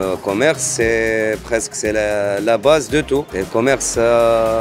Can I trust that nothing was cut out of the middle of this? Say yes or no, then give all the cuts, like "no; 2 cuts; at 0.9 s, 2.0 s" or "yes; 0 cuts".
yes; 0 cuts